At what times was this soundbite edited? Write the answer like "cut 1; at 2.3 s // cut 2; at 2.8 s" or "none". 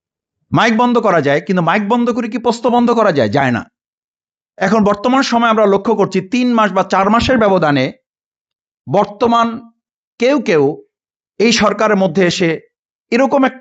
none